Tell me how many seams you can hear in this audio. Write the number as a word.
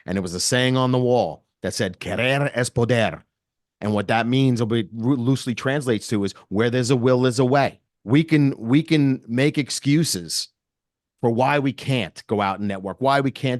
one